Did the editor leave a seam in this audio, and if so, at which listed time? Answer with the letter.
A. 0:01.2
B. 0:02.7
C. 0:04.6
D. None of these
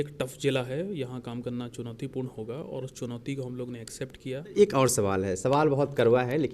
C